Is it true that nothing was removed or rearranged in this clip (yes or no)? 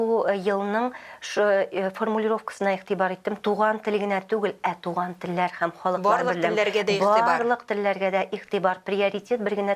yes